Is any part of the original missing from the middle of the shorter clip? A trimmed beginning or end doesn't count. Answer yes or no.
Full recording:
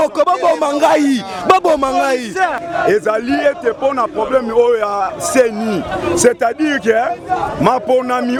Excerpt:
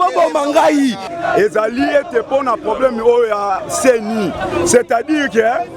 yes